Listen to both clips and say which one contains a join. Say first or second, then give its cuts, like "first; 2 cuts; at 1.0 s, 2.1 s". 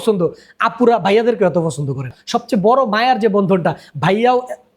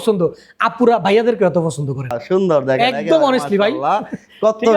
first; 1 cut; at 2.1 s